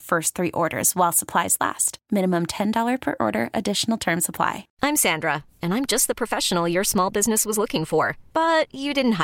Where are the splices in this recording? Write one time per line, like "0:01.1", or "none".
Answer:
0:04.7